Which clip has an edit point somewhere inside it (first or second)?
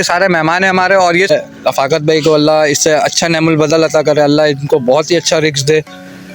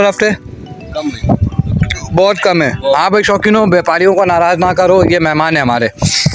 first